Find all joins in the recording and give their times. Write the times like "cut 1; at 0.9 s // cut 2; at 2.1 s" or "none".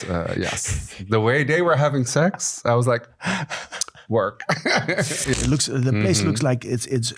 cut 1; at 5.3 s